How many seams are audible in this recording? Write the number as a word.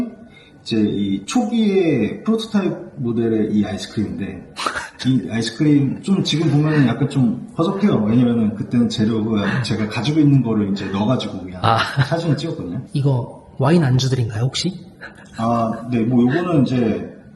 one